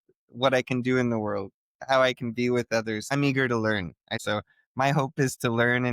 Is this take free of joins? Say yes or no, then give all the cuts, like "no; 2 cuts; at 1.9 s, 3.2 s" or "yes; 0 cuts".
no; 2 cuts; at 3.0 s, 4.2 s